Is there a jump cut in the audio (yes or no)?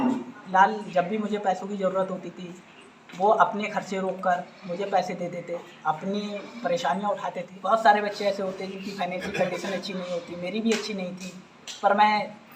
yes